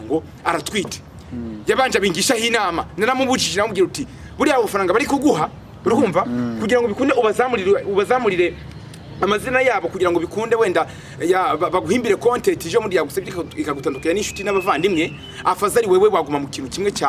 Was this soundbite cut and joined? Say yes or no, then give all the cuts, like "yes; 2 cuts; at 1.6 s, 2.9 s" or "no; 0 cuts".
no; 0 cuts